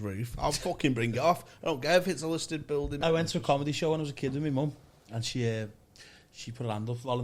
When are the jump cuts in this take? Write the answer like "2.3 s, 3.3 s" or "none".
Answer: 2.9 s